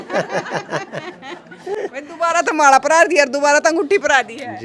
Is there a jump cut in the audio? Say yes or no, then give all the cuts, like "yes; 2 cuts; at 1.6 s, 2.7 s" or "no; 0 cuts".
no; 0 cuts